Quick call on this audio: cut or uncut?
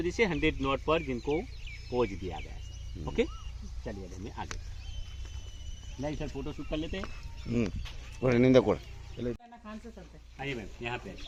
uncut